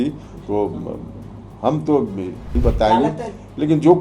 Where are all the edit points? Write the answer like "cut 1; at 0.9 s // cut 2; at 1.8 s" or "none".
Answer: cut 1; at 2.5 s